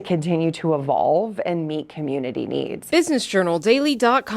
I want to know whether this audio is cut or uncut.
cut